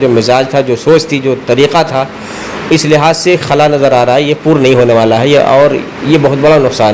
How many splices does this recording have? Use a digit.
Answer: 0